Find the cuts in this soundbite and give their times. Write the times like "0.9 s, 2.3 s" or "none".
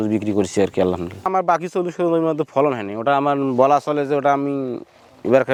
none